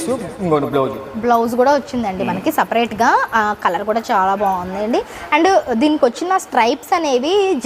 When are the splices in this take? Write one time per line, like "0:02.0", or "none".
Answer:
none

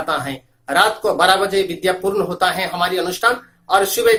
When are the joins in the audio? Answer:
none

